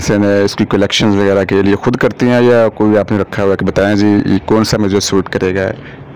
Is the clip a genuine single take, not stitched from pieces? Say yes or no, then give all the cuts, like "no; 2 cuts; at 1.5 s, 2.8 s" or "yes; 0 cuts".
yes; 0 cuts